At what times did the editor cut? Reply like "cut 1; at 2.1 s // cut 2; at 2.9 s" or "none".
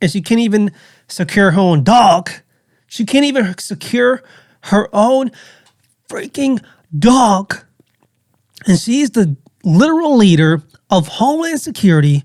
none

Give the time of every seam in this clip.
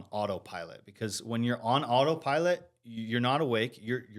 none

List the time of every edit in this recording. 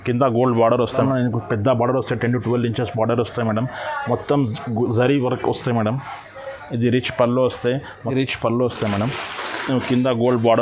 cut 1; at 1.0 s // cut 2; at 8.1 s

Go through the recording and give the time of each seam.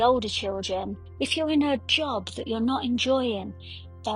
cut 1; at 1.0 s

